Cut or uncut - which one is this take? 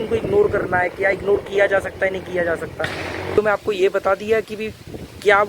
cut